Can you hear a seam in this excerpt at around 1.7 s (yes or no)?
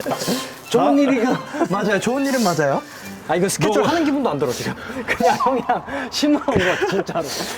no